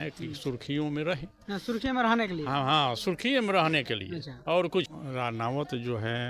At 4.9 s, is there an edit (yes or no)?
yes